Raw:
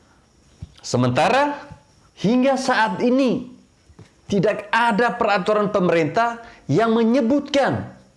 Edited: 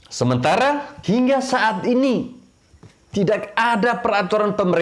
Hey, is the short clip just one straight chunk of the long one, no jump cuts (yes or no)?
no